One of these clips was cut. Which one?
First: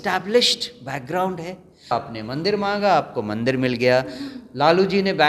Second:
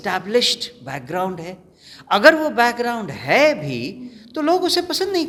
first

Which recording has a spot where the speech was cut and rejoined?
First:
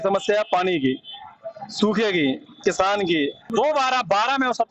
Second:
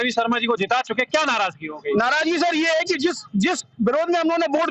first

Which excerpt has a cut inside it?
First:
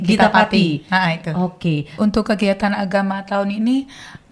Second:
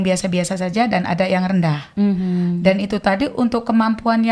first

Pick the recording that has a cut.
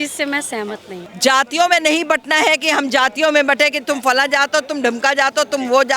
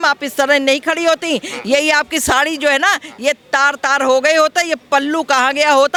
first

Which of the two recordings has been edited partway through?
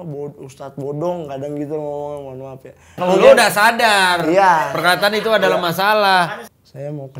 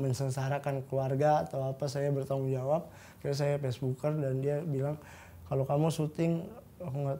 first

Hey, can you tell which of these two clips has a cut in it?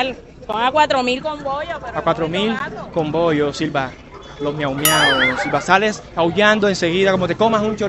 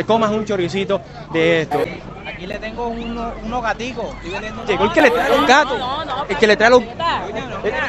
second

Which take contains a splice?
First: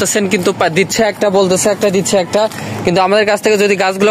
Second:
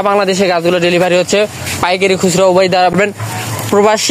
second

